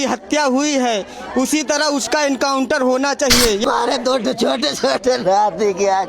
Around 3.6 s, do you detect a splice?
yes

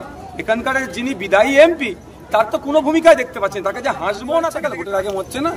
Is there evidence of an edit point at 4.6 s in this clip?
yes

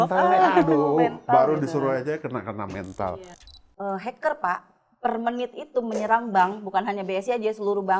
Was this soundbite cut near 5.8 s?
no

